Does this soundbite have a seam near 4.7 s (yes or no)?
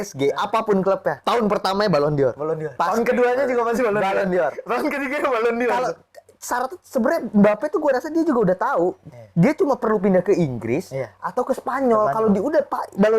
no